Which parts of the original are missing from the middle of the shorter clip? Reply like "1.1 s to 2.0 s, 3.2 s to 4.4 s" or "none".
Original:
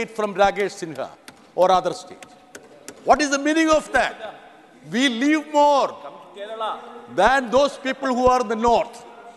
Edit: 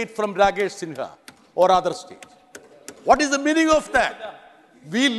none